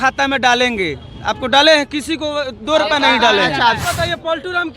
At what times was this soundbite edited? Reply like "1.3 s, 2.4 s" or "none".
3.8 s